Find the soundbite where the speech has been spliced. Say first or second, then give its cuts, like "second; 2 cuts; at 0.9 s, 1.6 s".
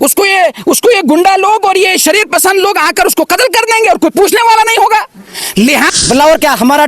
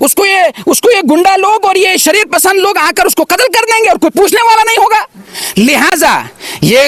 first; 1 cut; at 5.9 s